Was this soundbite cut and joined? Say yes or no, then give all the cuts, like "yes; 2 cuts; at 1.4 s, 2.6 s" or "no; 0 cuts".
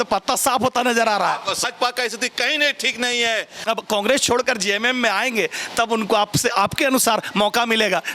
yes; 2 cuts; at 1.6 s, 3.5 s